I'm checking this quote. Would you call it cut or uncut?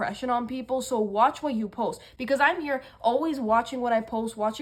uncut